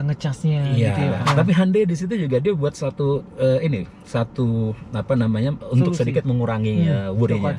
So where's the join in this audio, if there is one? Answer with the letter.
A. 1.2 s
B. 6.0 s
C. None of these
A